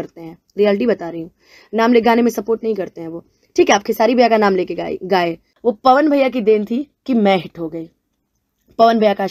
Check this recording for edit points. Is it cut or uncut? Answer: cut